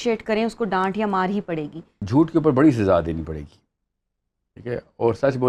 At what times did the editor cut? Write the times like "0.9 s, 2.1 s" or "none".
2.0 s